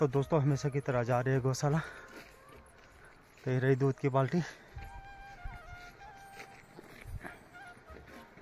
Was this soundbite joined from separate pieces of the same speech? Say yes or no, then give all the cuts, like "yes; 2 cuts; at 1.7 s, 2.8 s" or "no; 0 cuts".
no; 0 cuts